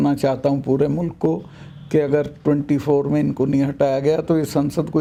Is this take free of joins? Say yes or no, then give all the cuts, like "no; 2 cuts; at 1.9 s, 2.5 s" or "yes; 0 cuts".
yes; 0 cuts